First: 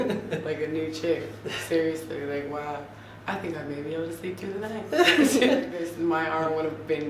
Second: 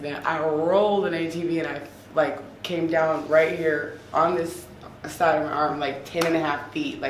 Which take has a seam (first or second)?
first